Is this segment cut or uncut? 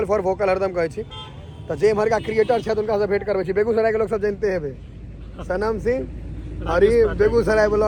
uncut